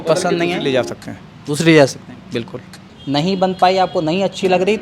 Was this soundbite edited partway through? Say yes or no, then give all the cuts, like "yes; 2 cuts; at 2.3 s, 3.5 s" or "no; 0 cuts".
yes; 1 cut; at 2.9 s